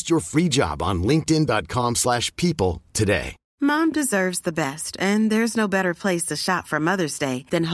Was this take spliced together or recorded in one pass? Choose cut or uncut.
cut